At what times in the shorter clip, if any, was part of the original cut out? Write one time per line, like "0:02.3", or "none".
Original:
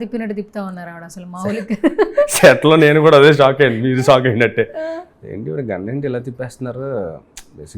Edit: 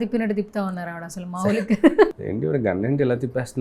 0:02.1